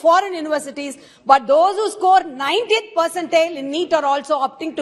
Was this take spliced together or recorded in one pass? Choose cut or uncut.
uncut